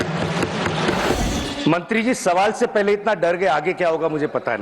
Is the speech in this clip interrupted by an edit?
yes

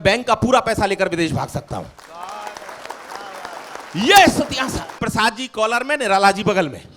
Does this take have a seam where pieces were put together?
yes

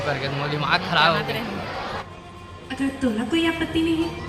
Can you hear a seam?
yes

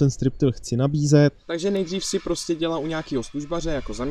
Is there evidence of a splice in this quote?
yes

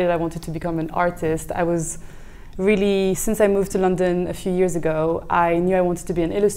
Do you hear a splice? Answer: no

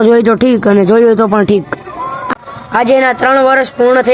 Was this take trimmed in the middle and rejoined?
yes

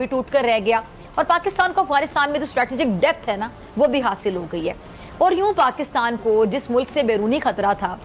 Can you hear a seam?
no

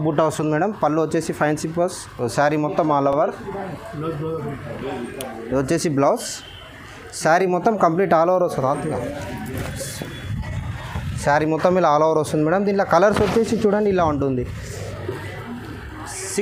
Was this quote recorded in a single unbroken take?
yes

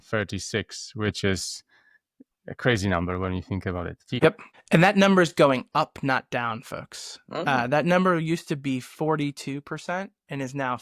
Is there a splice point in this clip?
yes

